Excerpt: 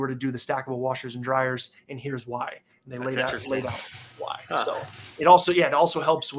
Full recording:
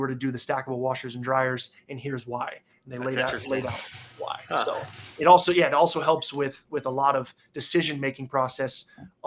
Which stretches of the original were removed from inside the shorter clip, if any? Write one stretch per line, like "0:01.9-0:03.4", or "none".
none